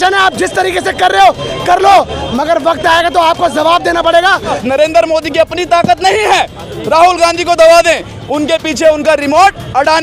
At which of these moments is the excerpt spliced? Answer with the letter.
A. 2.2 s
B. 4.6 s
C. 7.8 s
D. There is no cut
B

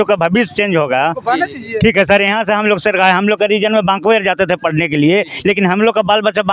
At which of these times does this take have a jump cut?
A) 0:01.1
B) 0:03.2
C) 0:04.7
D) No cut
D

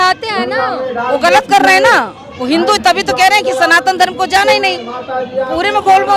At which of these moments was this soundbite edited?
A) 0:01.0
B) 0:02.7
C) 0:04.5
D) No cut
D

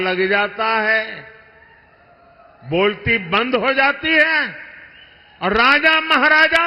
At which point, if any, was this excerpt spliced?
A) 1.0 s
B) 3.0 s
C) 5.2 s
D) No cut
D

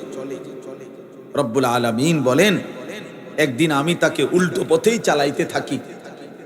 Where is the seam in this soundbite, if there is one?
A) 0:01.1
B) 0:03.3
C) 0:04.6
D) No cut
D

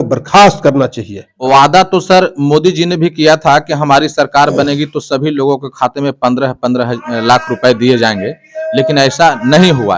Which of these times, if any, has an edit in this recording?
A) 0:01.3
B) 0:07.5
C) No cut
A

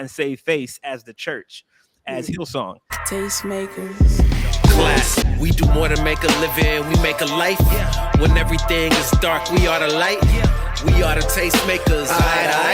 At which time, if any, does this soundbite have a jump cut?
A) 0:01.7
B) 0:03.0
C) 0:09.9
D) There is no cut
B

